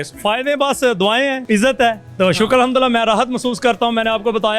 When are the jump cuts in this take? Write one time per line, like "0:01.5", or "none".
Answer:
0:01.8